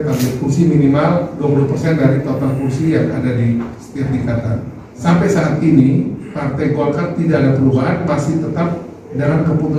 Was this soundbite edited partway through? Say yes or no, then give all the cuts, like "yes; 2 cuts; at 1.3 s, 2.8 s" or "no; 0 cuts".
yes; 1 cut; at 5.0 s